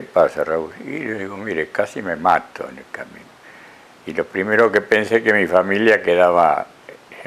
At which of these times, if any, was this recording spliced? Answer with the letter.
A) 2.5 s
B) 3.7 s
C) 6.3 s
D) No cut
D